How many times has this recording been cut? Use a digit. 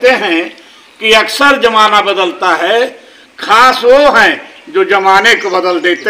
0